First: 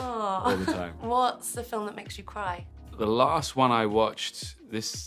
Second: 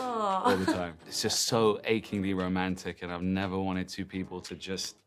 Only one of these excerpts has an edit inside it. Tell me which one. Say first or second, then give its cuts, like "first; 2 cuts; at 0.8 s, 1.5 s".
second; 1 cut; at 0.9 s